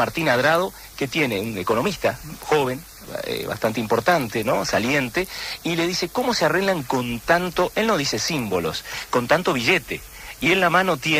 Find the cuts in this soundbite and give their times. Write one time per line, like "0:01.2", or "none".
none